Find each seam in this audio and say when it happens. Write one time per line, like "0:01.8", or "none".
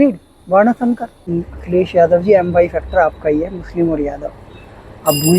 0:01.1

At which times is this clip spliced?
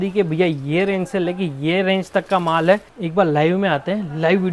0:03.0

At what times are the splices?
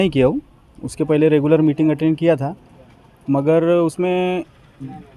none

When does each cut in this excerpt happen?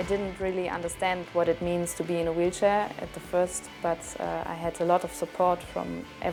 none

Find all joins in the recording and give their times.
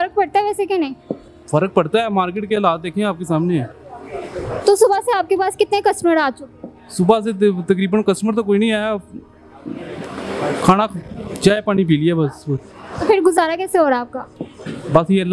none

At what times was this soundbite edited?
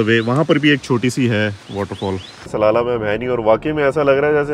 0:02.5

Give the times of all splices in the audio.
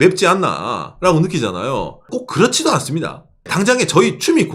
0:02.1
0:03.5

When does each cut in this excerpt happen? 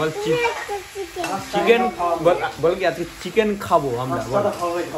none

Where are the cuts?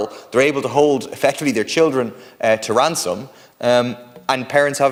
none

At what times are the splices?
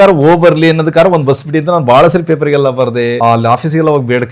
0:03.2

